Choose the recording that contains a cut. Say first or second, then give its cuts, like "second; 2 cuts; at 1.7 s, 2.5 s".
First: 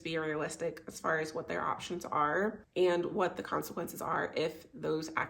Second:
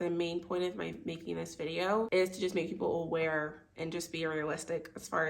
second; 1 cut; at 2.1 s